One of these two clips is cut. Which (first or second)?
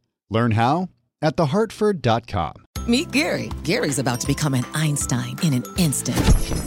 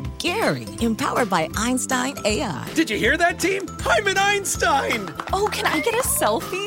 first